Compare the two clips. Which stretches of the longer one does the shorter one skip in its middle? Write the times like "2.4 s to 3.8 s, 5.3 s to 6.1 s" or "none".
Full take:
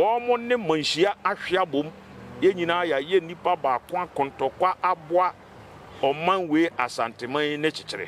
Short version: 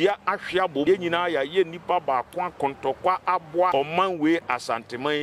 1.8 s to 2.4 s, 5.3 s to 6.0 s